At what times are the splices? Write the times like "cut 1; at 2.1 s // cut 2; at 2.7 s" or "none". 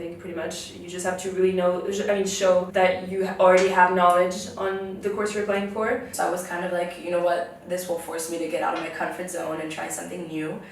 cut 1; at 2.7 s // cut 2; at 6.1 s